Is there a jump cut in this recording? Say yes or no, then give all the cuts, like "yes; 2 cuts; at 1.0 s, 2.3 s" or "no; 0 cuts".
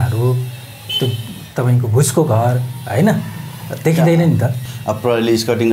no; 0 cuts